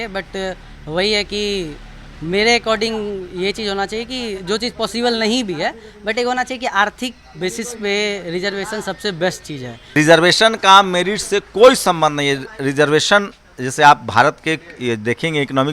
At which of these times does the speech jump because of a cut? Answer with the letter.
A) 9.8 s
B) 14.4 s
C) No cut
A